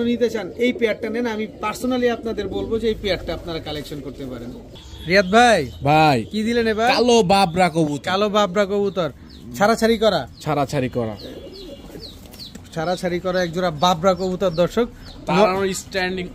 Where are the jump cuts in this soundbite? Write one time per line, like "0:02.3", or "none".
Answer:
none